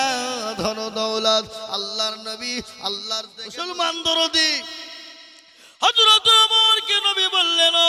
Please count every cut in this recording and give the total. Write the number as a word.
one